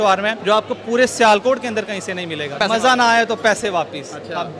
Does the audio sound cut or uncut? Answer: cut